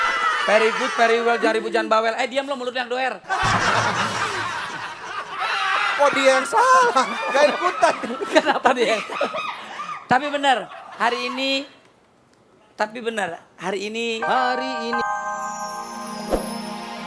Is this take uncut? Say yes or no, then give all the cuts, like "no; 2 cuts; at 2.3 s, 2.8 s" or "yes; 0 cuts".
no; 1 cut; at 14.7 s